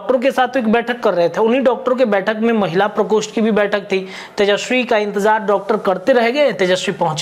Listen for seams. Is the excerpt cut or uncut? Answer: uncut